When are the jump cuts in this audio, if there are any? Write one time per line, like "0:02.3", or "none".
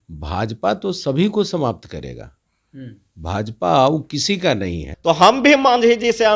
0:04.9